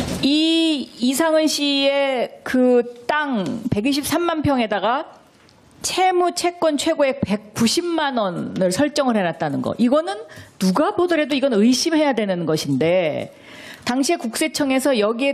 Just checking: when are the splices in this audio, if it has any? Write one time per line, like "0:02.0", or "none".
0:08.9